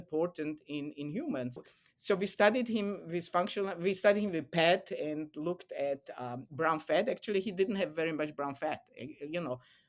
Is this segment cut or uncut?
cut